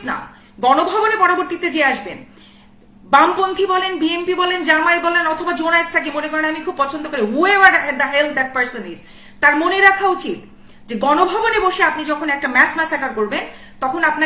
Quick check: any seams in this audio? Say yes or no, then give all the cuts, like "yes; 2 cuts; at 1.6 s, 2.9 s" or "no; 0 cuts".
no; 0 cuts